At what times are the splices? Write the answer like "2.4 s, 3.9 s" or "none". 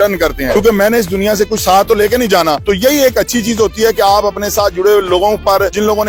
none